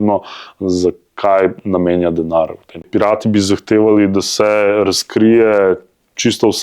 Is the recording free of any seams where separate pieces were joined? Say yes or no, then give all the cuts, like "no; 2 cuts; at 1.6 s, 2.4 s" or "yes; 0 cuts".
no; 1 cut; at 2.9 s